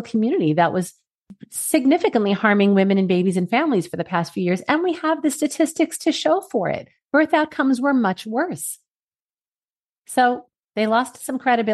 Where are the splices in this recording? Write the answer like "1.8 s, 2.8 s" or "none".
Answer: 10.6 s